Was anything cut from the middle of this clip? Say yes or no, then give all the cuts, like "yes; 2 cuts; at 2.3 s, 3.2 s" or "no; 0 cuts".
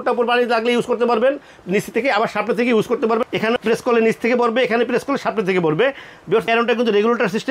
no; 0 cuts